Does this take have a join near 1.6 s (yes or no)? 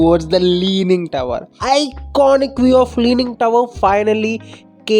yes